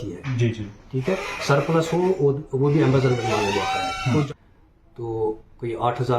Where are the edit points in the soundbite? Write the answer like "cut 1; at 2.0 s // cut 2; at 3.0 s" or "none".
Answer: cut 1; at 4.3 s